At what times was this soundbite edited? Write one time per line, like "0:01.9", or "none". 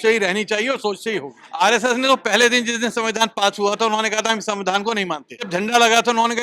0:01.4
0:05.3